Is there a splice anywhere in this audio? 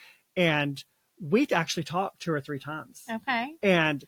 no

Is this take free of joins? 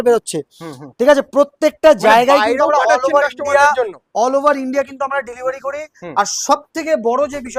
yes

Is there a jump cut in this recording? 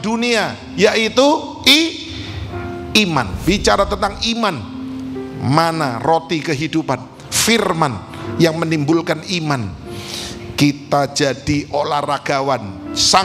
yes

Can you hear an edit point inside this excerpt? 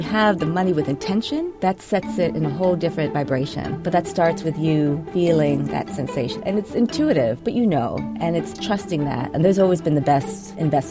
yes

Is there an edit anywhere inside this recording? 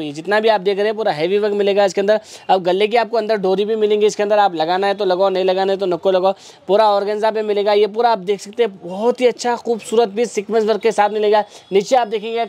no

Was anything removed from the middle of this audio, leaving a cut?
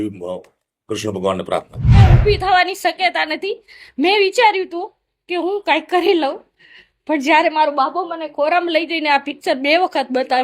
yes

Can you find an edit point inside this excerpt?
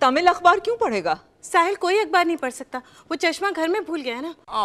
no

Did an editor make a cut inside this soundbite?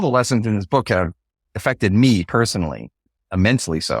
yes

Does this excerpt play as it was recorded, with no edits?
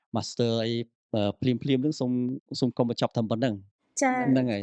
yes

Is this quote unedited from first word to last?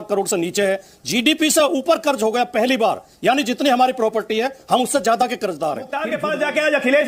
no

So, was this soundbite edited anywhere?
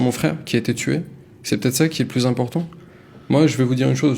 no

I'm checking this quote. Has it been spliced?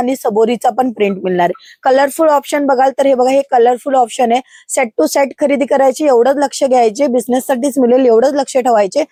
no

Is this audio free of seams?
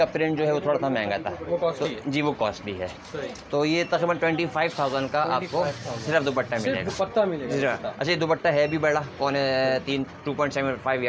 yes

